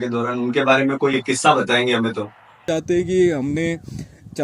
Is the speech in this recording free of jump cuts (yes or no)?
no